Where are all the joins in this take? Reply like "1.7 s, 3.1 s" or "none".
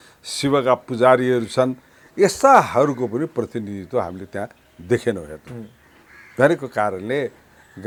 none